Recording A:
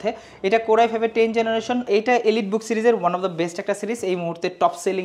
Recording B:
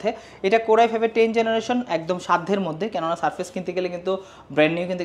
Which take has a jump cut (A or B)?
A